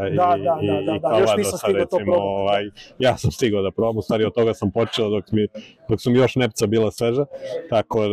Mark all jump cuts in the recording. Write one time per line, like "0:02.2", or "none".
none